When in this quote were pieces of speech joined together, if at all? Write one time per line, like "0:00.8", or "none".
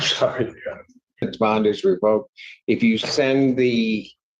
0:01.2